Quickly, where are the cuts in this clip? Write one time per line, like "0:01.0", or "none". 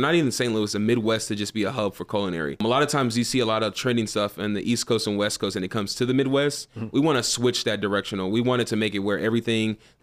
0:02.6